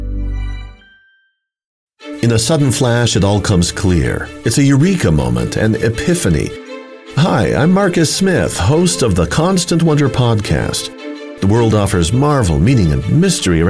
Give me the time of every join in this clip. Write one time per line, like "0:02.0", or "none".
0:01.8

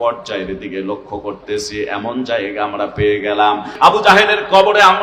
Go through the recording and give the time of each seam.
0:03.7

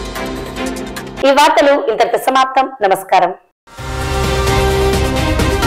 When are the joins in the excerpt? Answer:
none

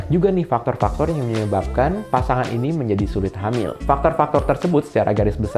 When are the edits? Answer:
none

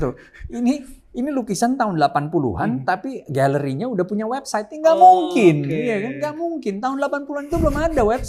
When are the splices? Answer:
none

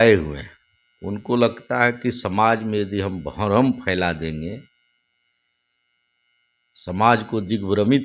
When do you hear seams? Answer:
none

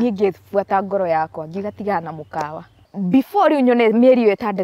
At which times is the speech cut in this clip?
0:02.9

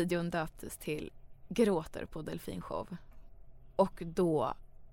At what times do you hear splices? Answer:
none

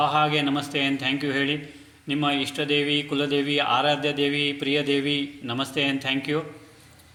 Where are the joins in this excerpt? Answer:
none

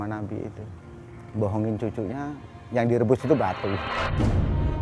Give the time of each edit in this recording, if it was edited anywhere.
0:03.9

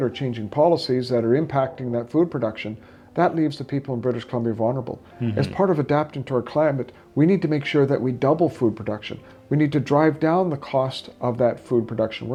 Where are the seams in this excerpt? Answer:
none

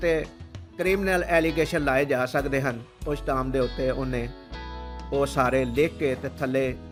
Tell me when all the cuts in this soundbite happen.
none

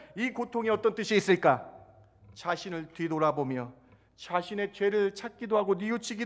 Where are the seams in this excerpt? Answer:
none

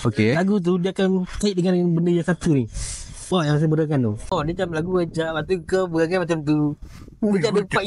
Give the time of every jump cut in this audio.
0:04.3

